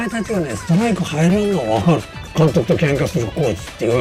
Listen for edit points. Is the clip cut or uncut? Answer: cut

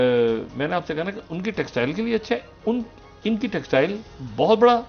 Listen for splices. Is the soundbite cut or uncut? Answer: uncut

